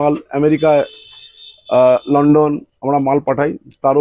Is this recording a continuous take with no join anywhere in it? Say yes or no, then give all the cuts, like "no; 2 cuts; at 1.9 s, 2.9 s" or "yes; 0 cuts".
yes; 0 cuts